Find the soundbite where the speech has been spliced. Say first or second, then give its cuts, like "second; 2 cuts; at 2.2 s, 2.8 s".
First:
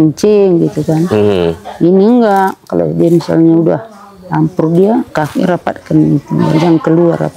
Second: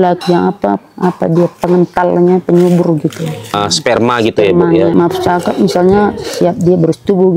second; 2 cuts; at 3.5 s, 4.9 s